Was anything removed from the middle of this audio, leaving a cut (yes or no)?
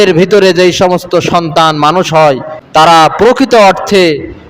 yes